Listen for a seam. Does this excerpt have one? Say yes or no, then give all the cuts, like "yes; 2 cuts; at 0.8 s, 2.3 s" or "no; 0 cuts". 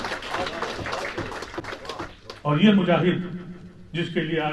no; 0 cuts